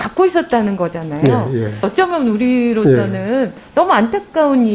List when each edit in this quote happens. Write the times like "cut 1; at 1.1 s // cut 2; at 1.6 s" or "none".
cut 1; at 1.9 s